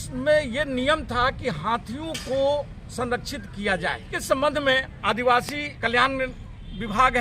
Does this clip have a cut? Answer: yes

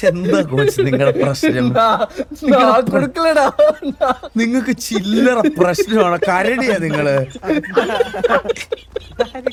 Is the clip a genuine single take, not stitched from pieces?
yes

